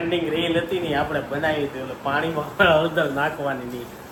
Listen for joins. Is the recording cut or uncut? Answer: uncut